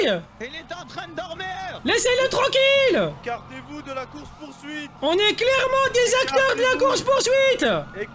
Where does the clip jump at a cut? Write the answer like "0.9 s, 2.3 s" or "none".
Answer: 1.8 s, 3.2 s, 4.9 s